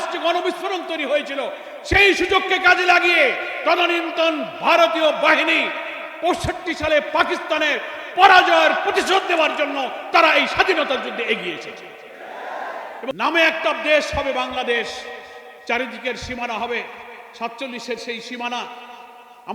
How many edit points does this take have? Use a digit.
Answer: 1